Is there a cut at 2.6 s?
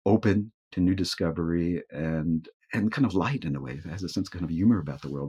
yes; 1 cut; at 2.6 s

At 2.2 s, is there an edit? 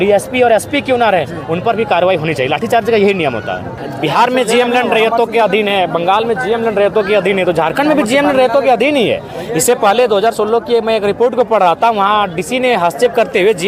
no; 1 cut; at 3.7 s

